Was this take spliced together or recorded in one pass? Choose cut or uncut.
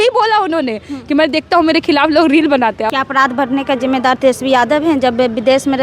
cut